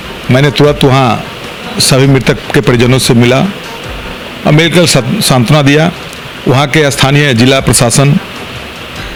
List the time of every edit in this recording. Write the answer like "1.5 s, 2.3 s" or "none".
none